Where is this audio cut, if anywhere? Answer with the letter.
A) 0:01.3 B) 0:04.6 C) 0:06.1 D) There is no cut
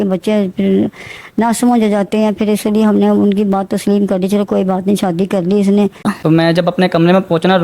C